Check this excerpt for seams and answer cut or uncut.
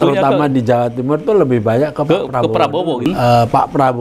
cut